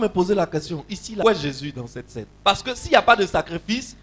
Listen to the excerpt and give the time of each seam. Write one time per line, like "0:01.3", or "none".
0:01.2
0:02.2